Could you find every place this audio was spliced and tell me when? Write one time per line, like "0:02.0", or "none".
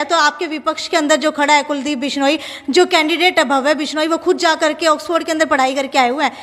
none

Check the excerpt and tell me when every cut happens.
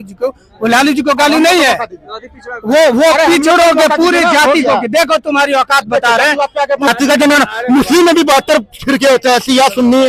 0:06.9

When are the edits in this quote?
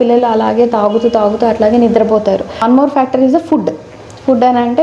0:02.6

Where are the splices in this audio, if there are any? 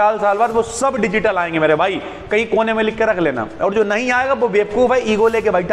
none

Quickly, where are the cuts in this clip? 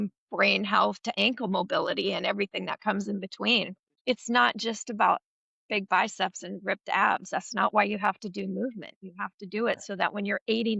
0:03.8

